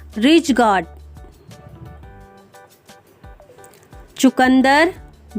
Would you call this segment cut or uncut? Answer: cut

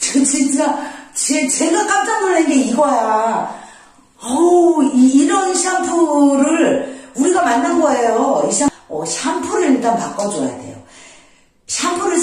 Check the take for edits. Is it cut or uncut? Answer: cut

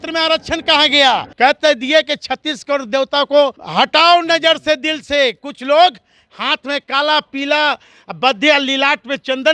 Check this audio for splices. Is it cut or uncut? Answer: cut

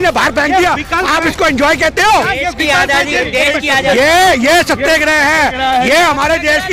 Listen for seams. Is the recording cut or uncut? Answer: uncut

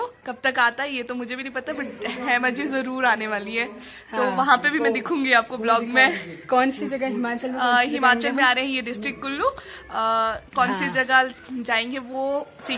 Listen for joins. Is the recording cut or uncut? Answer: uncut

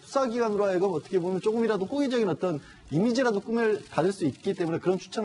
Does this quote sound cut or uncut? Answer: cut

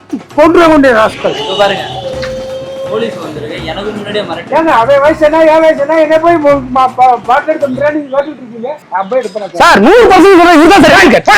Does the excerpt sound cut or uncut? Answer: cut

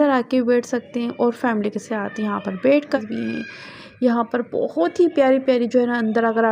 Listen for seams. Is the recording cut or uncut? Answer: cut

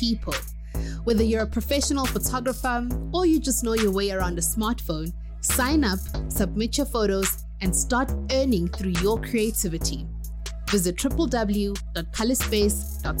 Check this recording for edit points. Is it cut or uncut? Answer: uncut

